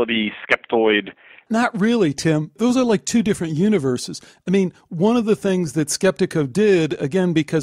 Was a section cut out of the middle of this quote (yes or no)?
yes